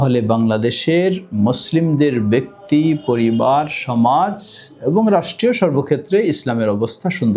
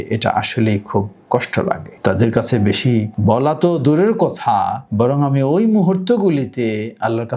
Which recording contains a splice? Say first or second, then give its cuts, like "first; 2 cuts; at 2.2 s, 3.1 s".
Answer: second; 3 cuts; at 1.9 s, 3.1 s, 4.8 s